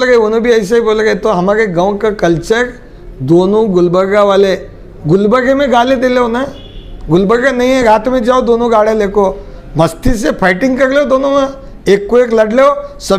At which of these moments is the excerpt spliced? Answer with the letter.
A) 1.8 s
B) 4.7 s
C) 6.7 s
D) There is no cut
D